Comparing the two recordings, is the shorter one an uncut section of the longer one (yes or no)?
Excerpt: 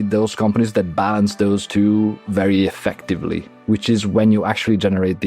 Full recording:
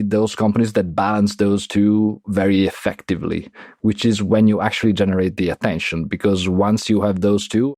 no